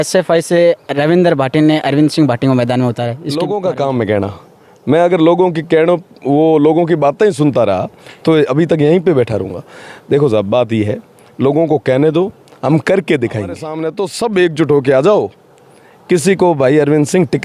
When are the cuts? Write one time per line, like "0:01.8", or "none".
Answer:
0:03.2
0:13.8